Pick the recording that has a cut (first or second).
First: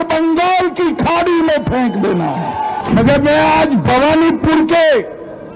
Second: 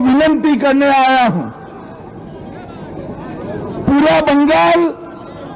first